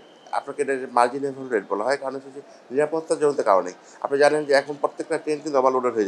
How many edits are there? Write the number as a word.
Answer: zero